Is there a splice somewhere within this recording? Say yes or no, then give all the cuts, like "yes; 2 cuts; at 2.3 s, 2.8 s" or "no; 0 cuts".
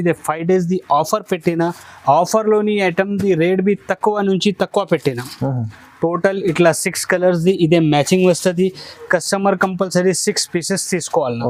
no; 0 cuts